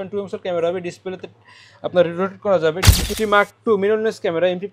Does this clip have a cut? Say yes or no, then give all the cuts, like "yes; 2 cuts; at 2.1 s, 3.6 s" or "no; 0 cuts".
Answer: yes; 1 cut; at 3.0 s